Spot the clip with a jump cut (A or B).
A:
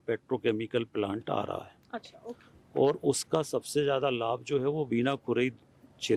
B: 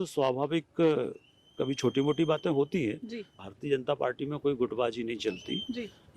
B